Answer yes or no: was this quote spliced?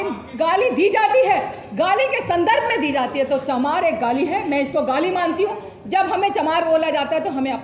no